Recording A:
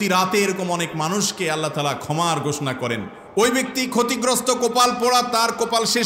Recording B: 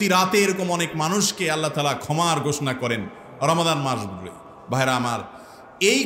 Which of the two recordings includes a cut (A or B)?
A